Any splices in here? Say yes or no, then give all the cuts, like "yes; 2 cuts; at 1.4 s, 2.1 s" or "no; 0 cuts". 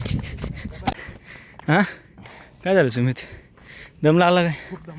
yes; 1 cut; at 0.9 s